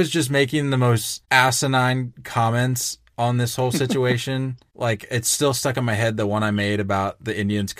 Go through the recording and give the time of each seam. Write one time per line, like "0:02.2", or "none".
0:01.1
0:02.2
0:04.6